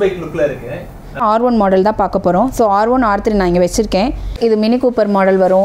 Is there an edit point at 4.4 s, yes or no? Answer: yes